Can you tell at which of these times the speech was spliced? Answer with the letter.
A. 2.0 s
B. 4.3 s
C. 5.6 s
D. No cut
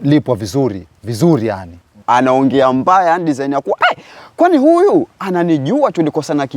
A